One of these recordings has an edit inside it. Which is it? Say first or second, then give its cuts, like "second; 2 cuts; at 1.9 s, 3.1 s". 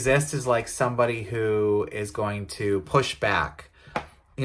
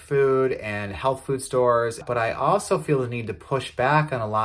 second; 1 cut; at 2.0 s